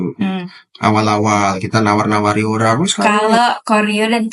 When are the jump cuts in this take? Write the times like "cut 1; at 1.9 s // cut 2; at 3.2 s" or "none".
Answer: cut 1; at 3.0 s